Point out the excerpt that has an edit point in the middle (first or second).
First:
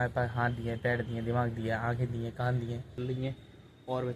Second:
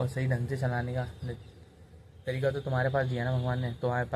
first